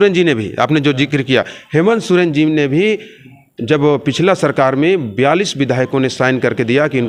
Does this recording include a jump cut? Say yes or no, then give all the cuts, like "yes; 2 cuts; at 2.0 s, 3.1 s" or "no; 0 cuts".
no; 0 cuts